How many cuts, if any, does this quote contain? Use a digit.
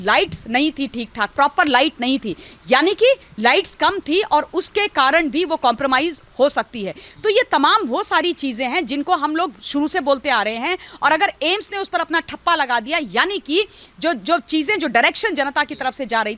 0